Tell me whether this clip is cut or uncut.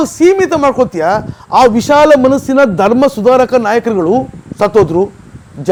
uncut